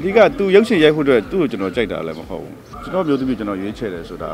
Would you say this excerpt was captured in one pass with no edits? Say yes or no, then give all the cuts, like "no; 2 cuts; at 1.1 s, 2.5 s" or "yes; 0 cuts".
no; 1 cut; at 2.8 s